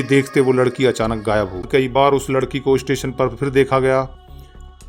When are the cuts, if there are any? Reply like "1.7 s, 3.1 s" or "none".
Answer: 1.7 s